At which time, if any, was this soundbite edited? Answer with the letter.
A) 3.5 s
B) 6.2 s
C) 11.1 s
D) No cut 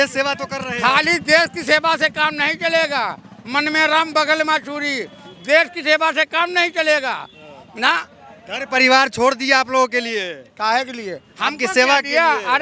D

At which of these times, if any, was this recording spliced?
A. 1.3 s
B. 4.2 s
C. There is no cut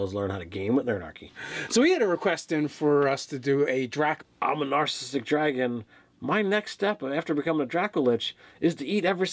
C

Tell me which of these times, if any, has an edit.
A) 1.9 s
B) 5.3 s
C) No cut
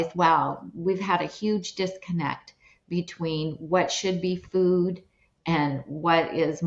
C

